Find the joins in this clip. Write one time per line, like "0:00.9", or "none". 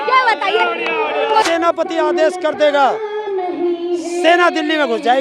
0:01.4